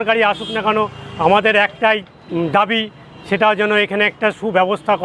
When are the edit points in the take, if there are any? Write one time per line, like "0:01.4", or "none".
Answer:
0:02.2